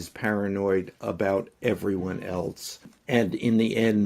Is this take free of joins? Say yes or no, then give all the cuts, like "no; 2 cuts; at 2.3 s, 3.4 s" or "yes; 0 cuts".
no; 1 cut; at 3.0 s